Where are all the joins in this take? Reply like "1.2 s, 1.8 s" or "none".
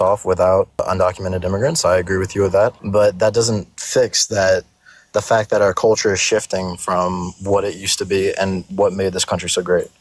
0.8 s, 2.8 s